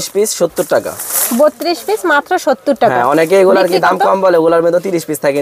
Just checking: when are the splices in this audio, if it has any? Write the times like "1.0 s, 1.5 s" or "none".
none